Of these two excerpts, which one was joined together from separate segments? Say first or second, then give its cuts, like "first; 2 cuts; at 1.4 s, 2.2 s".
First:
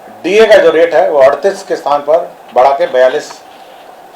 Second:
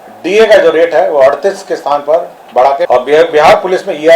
second; 1 cut; at 2.9 s